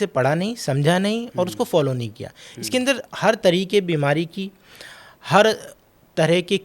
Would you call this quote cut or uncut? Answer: uncut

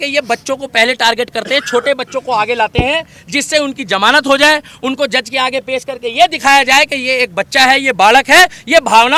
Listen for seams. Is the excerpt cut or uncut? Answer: uncut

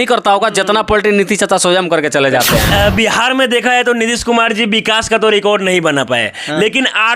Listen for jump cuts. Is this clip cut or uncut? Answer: cut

